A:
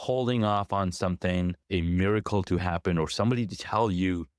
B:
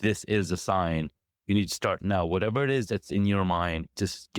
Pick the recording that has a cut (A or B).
A